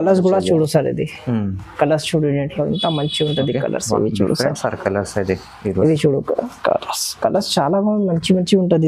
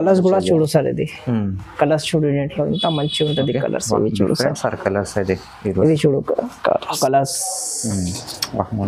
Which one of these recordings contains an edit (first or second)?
second